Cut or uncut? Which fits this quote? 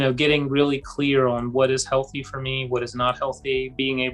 uncut